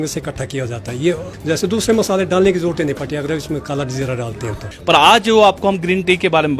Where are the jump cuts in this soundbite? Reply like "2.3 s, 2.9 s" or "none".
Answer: 1.3 s, 4.7 s